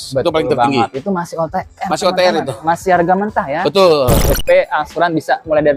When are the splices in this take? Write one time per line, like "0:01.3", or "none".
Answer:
0:04.3

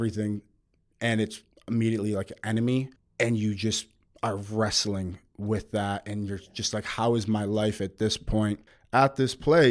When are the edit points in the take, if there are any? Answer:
0:03.0
0:08.7

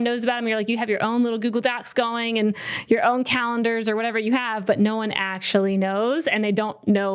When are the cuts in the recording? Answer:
none

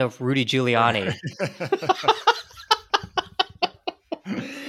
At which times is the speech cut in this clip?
none

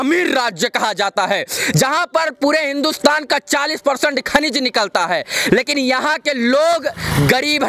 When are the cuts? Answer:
none

